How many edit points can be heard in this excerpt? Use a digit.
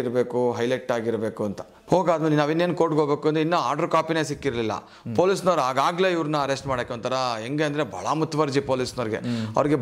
1